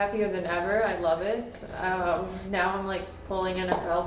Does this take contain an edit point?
no; 0 cuts

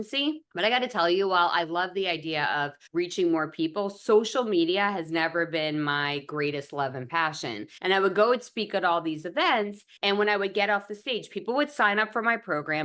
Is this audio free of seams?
yes; 0 cuts

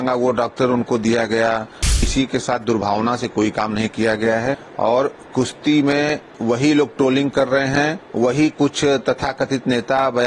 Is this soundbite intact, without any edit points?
no; 4 cuts; at 2.1 s, 4.7 s, 6.3 s, 8.0 s

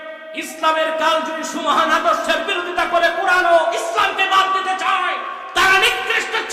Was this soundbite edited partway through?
no; 0 cuts

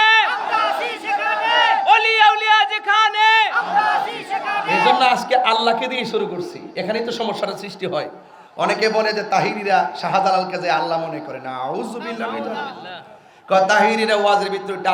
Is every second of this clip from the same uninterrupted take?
yes; 0 cuts

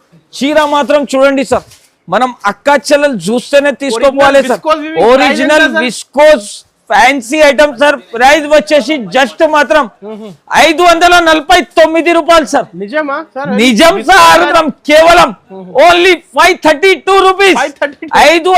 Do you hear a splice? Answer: yes; 1 cut; at 14.5 s

